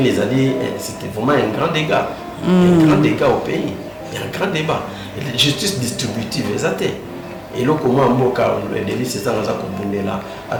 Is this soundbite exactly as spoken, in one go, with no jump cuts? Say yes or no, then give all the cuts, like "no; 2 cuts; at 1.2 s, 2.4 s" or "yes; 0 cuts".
yes; 0 cuts